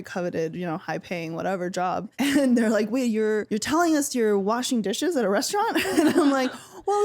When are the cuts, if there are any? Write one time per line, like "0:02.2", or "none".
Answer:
0:02.1
0:03.5